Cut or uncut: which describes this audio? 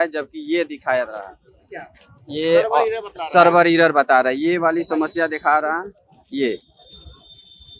uncut